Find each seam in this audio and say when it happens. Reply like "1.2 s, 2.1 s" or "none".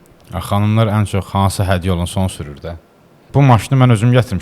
3.2 s

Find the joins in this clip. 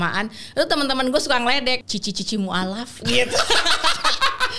1.9 s

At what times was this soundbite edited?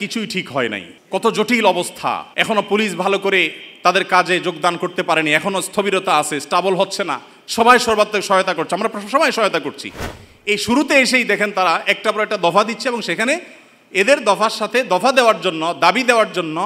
0.9 s, 2.3 s

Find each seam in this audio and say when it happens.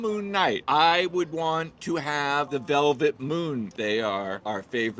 3.7 s

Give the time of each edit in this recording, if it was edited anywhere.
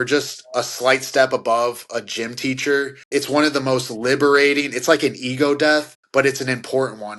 3.0 s, 6.0 s

